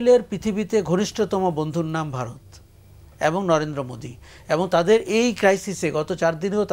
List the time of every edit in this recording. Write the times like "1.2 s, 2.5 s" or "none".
none